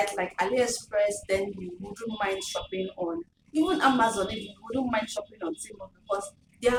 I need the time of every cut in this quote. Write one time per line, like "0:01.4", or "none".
none